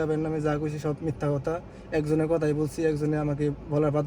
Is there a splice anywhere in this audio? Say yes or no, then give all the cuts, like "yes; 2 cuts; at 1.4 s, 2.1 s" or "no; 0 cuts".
no; 0 cuts